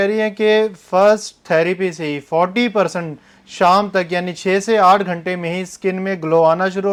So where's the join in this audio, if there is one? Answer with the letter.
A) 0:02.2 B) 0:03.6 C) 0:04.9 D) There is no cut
D